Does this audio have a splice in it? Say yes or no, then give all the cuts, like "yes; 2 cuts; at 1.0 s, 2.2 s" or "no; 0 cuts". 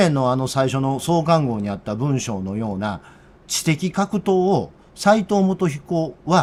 no; 0 cuts